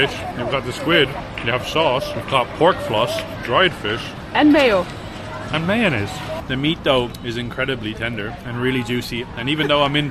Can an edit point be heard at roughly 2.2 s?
yes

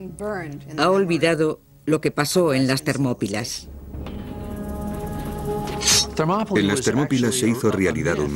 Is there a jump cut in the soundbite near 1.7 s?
no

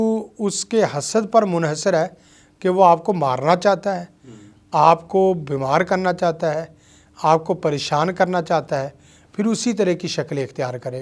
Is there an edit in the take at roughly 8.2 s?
no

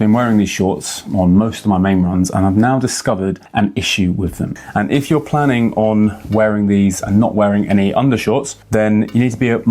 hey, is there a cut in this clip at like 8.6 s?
yes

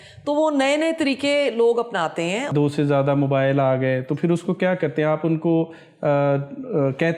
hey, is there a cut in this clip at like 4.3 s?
no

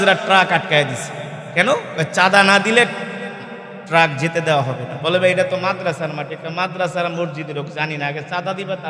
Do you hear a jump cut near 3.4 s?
no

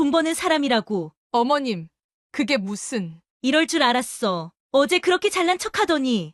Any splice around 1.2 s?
yes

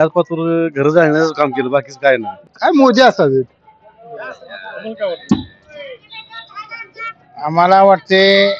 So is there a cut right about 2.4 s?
yes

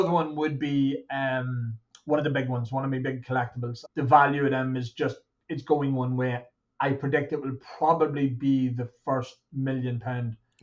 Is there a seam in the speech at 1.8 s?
no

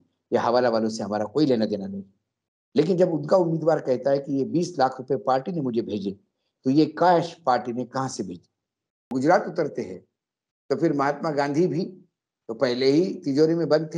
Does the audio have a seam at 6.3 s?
no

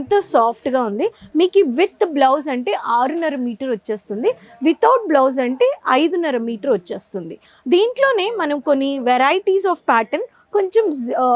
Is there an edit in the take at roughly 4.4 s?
no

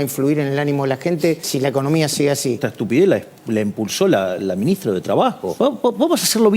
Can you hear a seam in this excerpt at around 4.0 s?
no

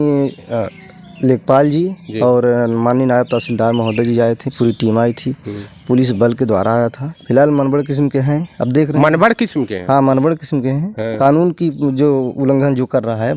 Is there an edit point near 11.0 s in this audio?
yes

